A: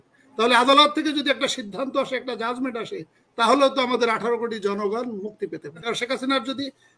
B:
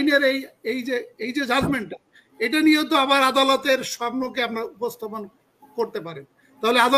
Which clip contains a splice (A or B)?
A